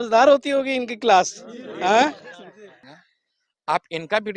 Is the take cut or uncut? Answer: cut